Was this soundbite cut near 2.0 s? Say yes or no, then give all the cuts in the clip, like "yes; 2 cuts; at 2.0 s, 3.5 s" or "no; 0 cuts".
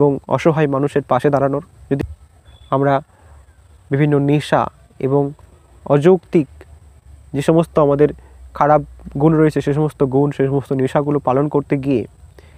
yes; 1 cut; at 2.0 s